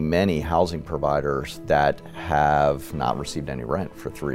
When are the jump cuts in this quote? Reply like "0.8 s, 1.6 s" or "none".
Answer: none